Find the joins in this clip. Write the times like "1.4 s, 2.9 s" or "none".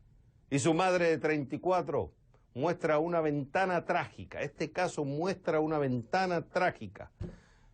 4.6 s